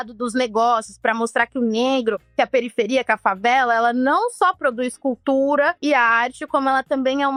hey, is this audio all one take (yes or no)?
yes